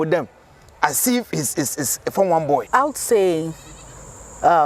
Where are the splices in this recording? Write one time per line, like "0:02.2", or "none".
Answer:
0:02.6